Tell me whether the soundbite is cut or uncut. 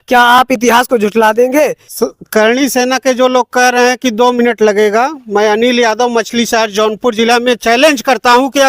cut